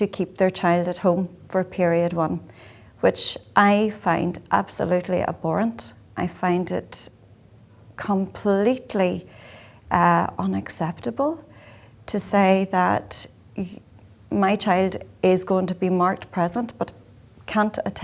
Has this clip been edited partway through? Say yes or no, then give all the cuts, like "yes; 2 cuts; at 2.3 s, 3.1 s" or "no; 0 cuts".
no; 0 cuts